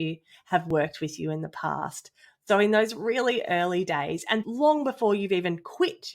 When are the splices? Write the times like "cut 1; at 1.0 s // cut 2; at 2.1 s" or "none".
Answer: cut 1; at 4.4 s